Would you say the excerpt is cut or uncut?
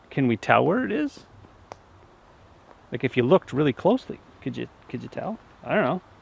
uncut